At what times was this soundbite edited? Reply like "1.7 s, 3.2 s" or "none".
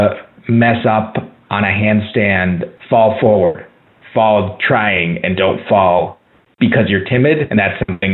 2.7 s

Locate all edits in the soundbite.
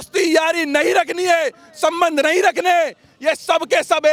none

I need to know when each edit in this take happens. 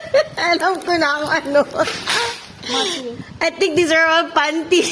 none

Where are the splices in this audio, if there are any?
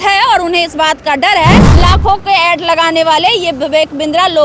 1.7 s

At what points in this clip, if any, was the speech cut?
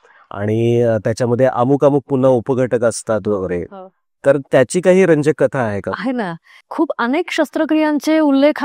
6.7 s

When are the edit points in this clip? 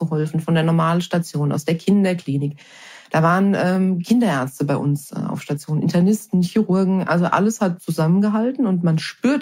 none

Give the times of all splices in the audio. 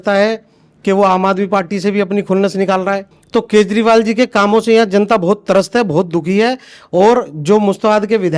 3.1 s

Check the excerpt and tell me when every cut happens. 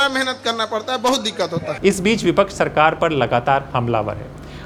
none

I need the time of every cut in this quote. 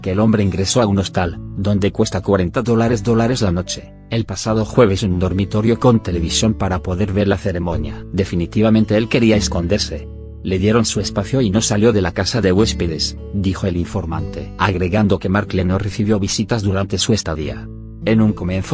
none

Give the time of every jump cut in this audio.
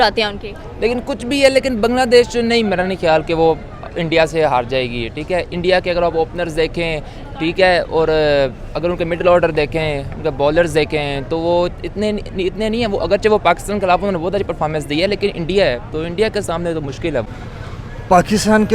17.2 s

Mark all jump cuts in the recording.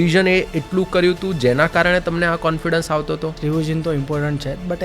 3.4 s

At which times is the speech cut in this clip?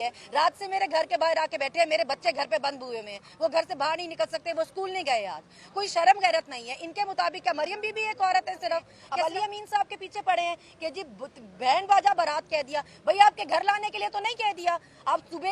9.0 s

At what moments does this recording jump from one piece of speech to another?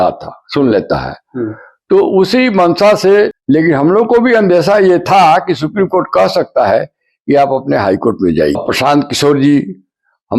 3.4 s, 8.6 s

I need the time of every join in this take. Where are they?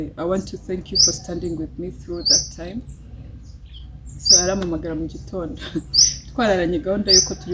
none

